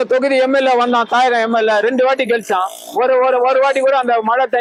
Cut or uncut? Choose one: uncut